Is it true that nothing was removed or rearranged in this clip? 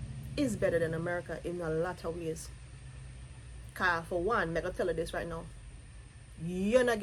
yes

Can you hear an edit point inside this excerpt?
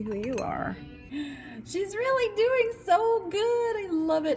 yes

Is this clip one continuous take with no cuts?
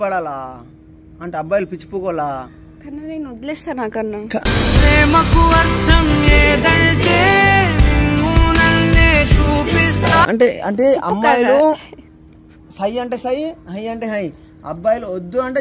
yes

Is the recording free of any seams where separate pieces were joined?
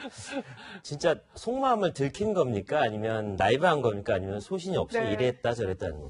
yes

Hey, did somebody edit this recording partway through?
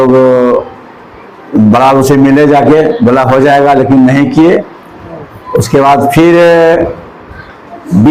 no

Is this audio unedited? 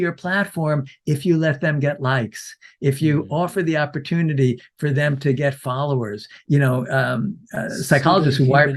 no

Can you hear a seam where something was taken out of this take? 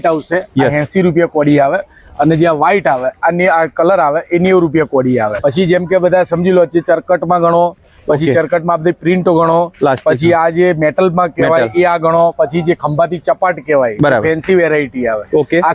no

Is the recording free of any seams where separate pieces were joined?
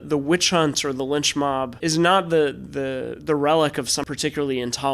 no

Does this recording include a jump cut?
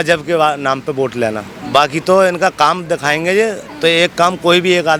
no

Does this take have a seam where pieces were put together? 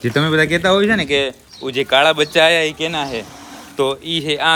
no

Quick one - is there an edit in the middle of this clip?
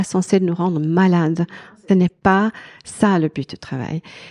yes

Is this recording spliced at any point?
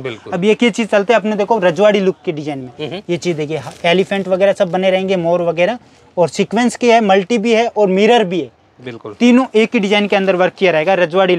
no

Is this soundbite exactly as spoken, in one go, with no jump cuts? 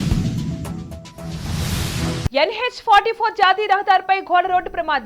no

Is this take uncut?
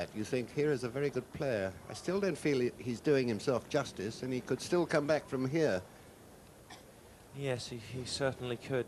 no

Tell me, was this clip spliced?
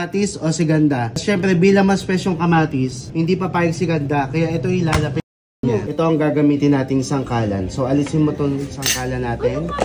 yes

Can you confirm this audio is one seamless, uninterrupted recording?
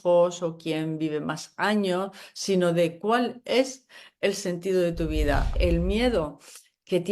no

